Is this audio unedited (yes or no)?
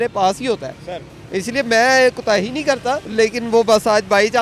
no